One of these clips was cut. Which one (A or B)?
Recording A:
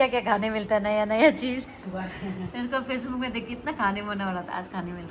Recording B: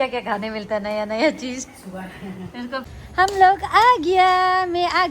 B